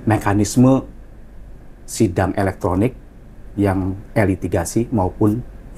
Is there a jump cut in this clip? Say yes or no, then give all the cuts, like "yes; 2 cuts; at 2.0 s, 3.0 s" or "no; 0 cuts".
no; 0 cuts